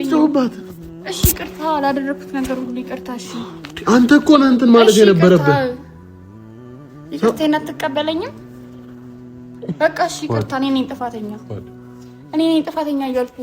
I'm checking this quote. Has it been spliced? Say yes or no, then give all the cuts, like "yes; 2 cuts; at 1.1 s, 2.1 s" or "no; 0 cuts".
yes; 2 cuts; at 8.3 s, 9.6 s